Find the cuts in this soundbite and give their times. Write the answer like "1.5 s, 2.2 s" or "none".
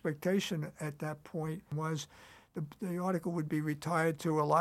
1.7 s